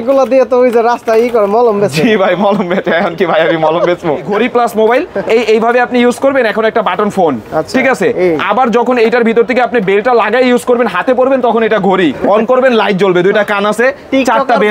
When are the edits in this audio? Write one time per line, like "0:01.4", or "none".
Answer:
0:04.3
0:12.2